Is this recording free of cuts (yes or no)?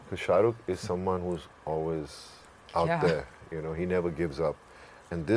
yes